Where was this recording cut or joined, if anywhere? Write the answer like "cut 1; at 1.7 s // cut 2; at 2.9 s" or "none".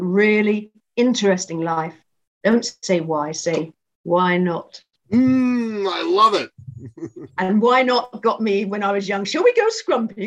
none